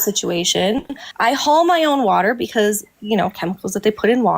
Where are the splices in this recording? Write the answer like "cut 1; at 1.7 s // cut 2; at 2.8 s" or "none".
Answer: cut 1; at 1.0 s